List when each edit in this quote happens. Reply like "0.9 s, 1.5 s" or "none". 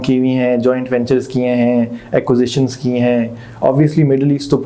none